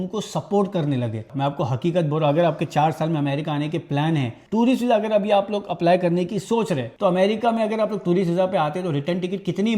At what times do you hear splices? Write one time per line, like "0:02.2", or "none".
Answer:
0:01.3
0:04.4
0:06.9